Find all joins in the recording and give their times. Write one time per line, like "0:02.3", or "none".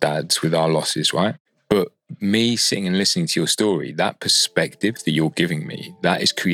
0:01.5